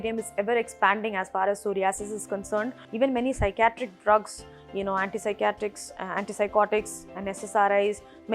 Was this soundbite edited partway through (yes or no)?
yes